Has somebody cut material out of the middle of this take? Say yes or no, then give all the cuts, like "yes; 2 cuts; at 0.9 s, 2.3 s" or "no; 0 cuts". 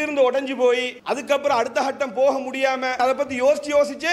yes; 2 cuts; at 0.9 s, 3.0 s